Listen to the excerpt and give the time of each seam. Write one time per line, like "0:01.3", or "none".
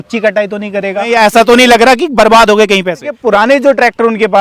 0:01.1
0:03.1